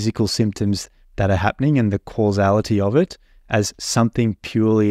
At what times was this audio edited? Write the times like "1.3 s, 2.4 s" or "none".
none